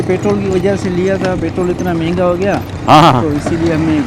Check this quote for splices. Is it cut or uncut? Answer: uncut